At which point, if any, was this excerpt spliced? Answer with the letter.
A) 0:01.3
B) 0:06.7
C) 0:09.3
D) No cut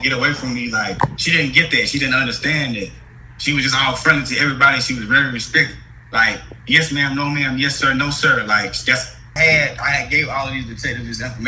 C